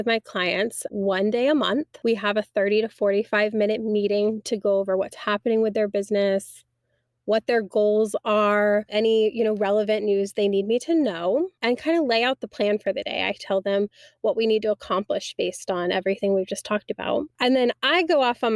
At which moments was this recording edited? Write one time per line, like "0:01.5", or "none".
0:00.9
0:01.9
0:08.9
0:11.5
0:17.3